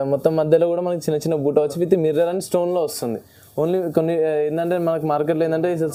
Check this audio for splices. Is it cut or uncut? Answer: uncut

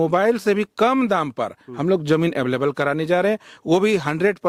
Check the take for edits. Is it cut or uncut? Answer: uncut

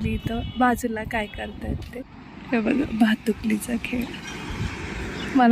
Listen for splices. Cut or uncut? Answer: cut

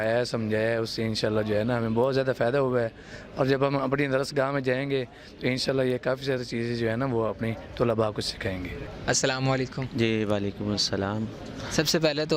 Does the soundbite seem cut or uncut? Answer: uncut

